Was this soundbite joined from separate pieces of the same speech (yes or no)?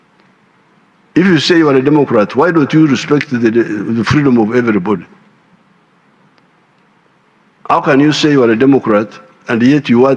no